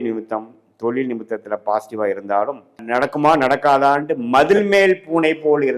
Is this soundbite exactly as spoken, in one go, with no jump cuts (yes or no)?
no